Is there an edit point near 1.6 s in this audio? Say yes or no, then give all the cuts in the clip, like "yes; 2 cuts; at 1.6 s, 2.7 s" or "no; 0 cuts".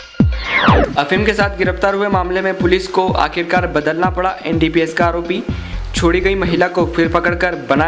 no; 0 cuts